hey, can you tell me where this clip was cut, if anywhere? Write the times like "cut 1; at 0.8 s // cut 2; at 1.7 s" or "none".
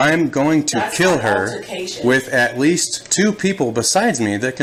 none